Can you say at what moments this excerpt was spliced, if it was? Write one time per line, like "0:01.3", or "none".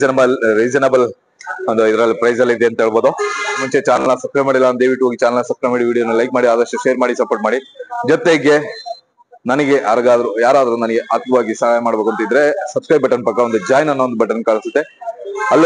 0:03.7